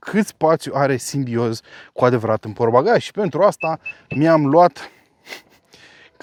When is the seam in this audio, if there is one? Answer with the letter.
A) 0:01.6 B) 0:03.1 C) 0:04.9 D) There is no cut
D